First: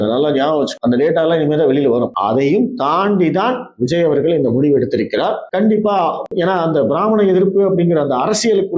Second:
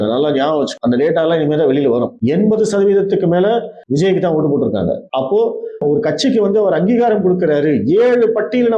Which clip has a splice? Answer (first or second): first